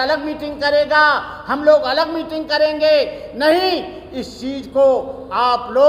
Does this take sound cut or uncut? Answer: uncut